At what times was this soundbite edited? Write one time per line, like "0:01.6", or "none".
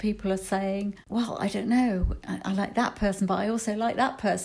0:01.0